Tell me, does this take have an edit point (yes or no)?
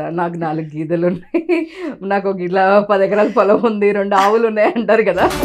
no